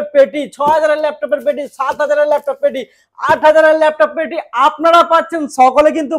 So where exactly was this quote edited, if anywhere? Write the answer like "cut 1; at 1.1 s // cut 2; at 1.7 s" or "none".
none